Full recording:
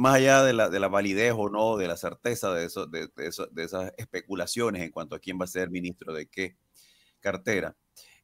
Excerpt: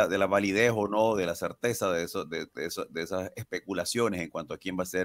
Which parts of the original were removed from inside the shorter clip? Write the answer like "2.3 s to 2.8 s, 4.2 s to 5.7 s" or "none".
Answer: none